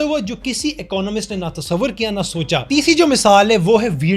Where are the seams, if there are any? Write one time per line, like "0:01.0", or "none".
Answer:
0:02.6